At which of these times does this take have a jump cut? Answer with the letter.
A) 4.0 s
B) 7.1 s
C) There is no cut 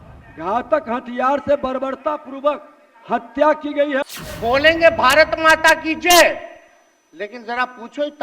A